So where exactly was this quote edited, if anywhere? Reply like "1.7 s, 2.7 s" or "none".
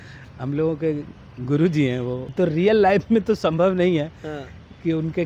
2.3 s